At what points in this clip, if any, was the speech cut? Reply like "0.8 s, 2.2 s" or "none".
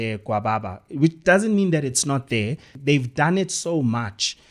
2.7 s